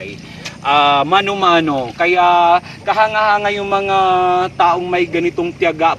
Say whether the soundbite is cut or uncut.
uncut